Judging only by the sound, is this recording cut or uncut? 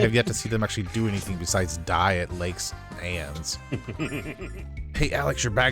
cut